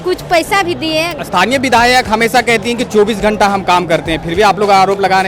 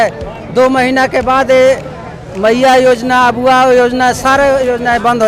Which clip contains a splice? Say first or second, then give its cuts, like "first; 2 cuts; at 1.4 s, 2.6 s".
first; 1 cut; at 1.2 s